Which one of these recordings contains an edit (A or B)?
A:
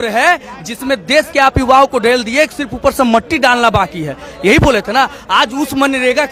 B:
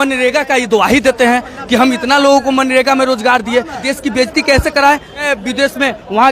B